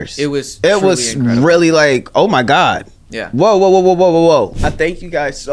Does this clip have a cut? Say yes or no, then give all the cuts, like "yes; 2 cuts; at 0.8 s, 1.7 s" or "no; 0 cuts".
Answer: yes; 1 cut; at 4.5 s